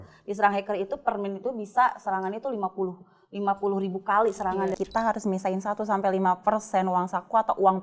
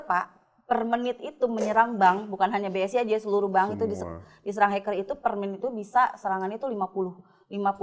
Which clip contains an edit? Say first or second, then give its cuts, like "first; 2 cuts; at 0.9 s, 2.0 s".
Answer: first; 1 cut; at 4.7 s